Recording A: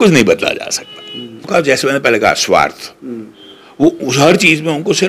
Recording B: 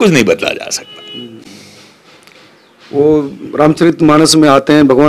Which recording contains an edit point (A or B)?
A